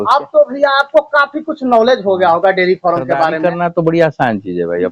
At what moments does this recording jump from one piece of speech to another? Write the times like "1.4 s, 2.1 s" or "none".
3.4 s